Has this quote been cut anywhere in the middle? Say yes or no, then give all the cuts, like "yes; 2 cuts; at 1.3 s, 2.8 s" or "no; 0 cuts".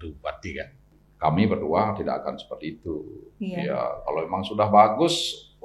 yes; 1 cut; at 0.9 s